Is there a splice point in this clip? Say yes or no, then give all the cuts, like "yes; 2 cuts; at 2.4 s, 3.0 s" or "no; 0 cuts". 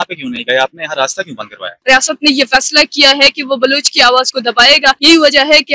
yes; 2 cuts; at 1.7 s, 5.0 s